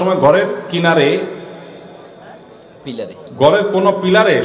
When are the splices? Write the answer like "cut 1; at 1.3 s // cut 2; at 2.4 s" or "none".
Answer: none

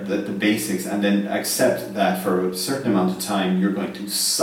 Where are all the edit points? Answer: none

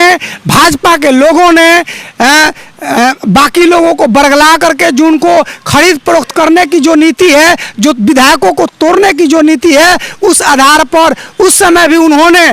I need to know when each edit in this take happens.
none

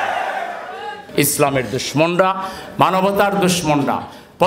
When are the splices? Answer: cut 1; at 0.9 s

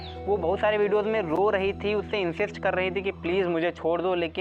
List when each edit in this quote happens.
none

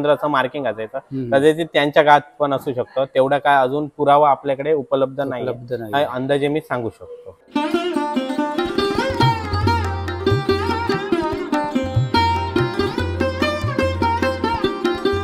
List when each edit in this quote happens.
none

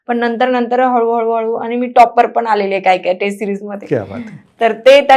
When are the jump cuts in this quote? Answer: none

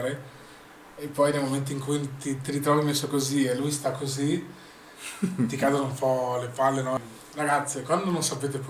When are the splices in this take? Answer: cut 1; at 7.0 s

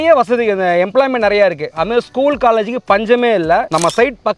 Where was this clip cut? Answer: none

